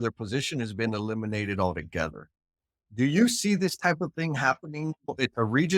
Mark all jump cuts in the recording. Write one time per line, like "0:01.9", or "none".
none